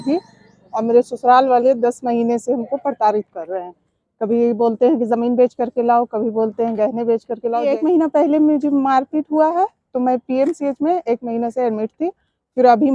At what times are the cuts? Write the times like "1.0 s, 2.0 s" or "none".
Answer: 7.6 s